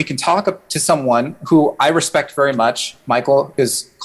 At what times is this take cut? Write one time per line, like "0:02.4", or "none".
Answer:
none